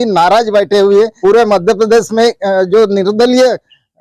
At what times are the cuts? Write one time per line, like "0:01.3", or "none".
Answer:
0:01.1

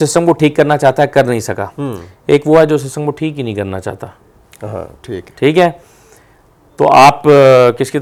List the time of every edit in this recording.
none

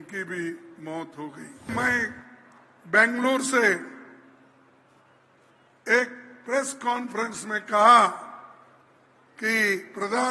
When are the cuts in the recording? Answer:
0:01.7

